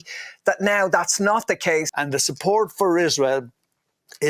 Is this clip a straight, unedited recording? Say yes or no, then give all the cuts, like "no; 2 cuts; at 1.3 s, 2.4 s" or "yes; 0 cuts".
no; 1 cut; at 1.9 s